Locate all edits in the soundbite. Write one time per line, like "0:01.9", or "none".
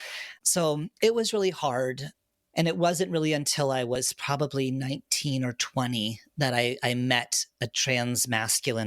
0:02.1